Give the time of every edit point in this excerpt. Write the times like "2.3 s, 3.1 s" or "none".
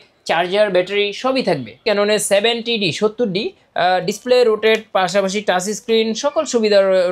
1.8 s